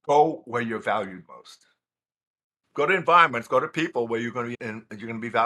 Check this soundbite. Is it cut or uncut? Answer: cut